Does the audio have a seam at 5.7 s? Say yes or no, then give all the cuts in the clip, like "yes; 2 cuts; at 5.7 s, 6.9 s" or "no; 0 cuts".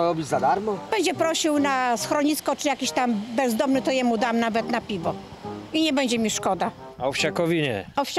no; 2 cuts; at 0.8 s, 6.9 s